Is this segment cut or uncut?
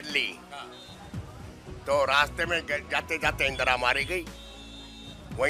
uncut